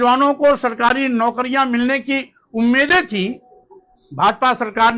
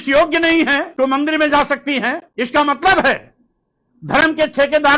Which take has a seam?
second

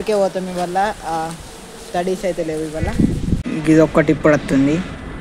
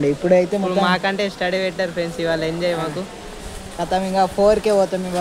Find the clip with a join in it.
first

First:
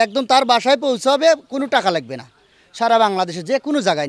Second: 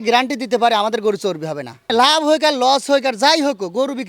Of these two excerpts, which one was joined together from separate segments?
second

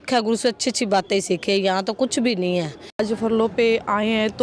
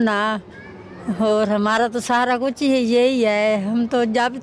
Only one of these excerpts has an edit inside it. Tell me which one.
first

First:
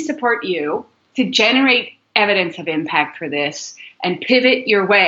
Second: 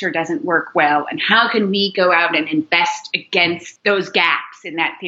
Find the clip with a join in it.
second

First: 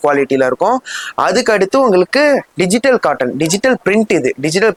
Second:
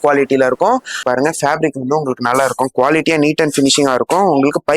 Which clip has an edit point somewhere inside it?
second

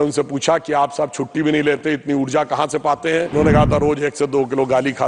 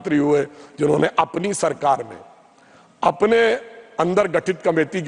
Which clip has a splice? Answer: first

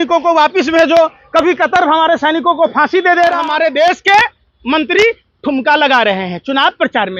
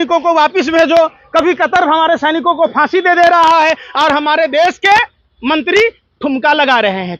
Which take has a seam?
first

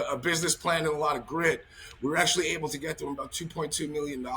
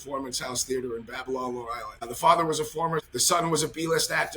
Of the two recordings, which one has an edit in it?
second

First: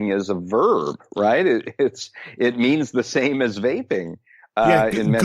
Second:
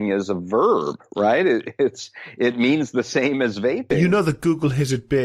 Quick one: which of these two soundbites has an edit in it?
second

